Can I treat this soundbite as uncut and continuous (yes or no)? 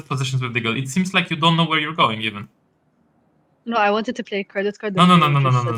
yes